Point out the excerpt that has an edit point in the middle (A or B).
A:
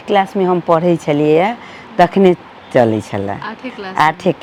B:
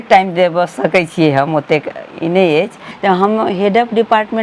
B